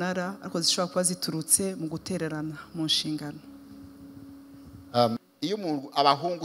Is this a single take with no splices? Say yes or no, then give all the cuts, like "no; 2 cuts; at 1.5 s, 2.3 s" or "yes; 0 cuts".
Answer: no; 1 cut; at 5.3 s